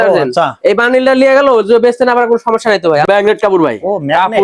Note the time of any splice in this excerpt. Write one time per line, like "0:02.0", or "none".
0:03.0